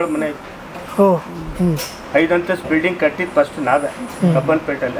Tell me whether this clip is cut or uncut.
uncut